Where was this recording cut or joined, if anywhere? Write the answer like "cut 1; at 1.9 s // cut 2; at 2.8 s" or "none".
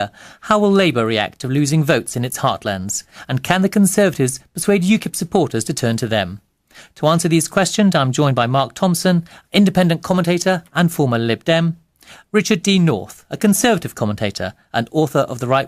none